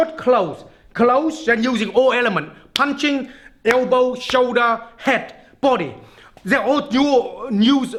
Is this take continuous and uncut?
yes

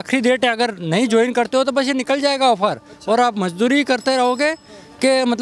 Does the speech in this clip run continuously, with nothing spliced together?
yes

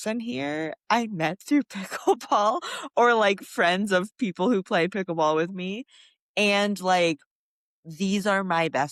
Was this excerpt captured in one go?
yes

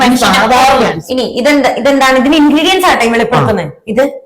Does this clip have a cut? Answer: yes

